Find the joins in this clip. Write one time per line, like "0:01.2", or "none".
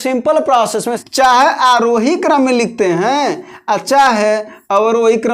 0:01.0